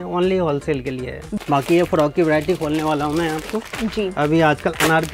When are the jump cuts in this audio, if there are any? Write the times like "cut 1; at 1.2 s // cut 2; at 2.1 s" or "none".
cut 1; at 1.3 s